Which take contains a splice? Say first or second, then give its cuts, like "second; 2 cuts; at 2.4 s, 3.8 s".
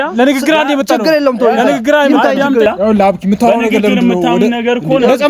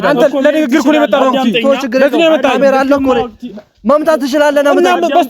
first; 1 cut; at 2.7 s